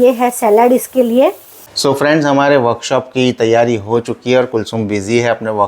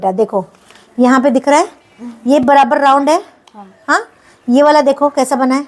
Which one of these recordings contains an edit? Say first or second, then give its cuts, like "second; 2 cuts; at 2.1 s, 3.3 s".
first; 1 cut; at 1.7 s